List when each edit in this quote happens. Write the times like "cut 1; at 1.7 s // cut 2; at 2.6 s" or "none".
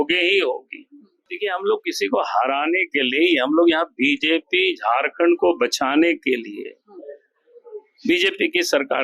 cut 1; at 1.3 s

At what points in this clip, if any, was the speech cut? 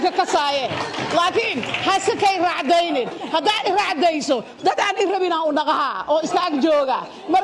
none

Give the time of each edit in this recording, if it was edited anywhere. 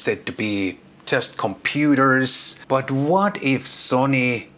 cut 1; at 2.5 s

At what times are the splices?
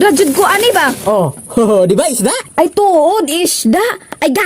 cut 1; at 2.4 s

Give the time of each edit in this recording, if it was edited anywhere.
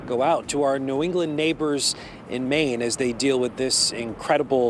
none

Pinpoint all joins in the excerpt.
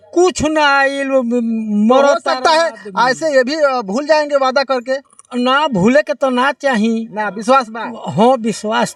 none

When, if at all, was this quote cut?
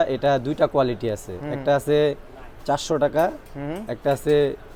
none

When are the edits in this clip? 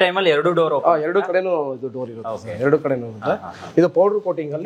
none

